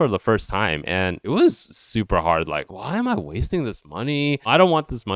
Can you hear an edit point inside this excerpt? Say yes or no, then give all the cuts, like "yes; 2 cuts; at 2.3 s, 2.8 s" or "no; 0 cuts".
yes; 3 cuts; at 1.2 s, 2.7 s, 4.5 s